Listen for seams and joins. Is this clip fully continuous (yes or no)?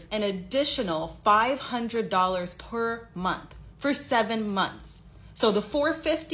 yes